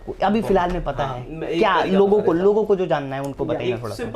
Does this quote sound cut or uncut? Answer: uncut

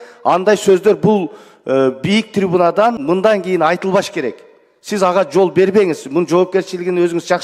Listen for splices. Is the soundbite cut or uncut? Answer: cut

